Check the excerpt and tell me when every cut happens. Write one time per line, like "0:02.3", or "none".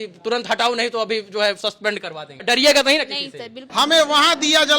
0:02.4
0:03.6

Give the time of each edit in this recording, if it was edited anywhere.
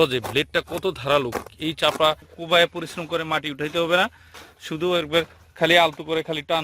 0:02.3

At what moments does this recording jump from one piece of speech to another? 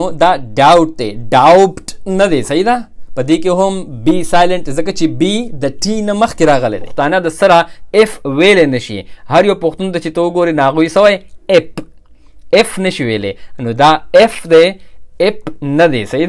0:06.9

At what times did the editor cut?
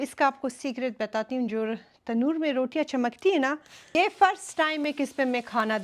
0:03.9

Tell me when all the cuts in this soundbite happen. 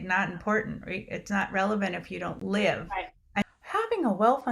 0:03.4

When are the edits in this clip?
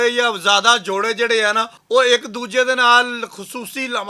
0:01.7

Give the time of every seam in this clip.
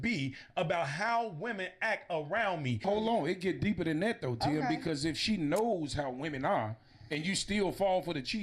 0:02.8

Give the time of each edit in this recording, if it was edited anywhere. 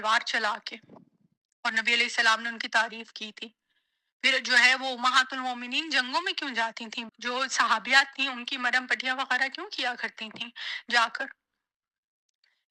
none

